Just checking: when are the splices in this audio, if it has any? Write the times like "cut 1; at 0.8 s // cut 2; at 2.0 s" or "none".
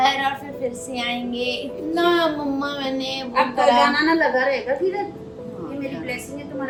none